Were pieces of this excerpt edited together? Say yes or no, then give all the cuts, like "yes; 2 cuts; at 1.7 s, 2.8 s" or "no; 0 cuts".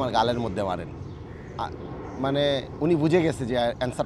no; 0 cuts